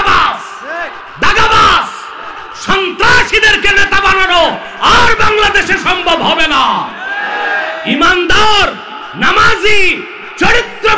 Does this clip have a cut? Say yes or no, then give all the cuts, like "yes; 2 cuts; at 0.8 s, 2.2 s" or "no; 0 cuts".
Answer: no; 0 cuts